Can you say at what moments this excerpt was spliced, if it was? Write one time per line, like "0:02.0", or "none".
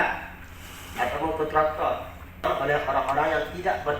0:02.4

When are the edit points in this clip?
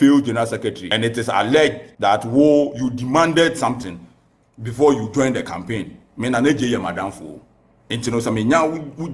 0:00.8
0:01.9

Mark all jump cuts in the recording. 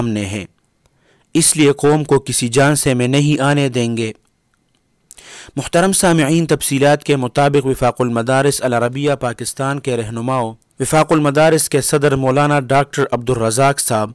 0:10.6

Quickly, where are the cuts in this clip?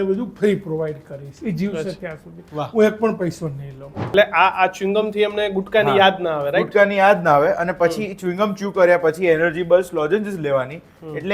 0:04.0

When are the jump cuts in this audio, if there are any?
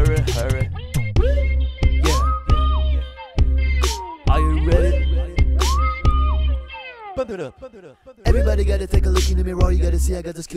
0:01.1

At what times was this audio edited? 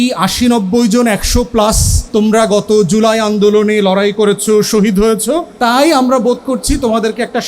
0:01.9
0:05.5

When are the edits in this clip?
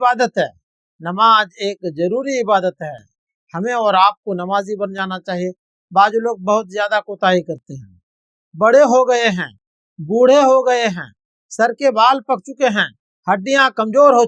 none

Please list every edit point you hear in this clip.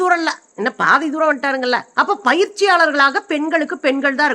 none

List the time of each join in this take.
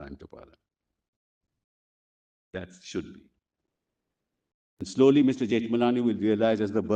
0:04.8

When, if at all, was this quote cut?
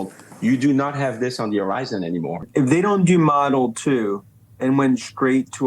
0:02.4

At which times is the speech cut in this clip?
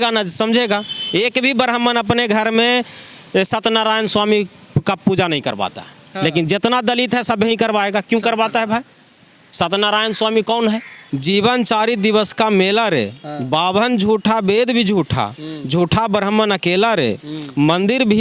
0:11.1

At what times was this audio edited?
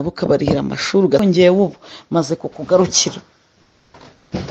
0:01.2

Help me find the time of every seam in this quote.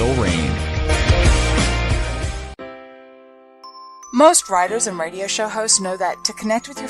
0:02.4

